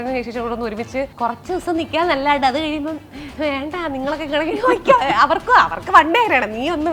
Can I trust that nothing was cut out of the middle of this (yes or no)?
no